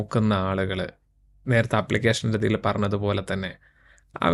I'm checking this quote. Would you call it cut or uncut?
uncut